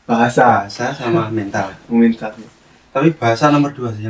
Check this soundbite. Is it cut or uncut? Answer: uncut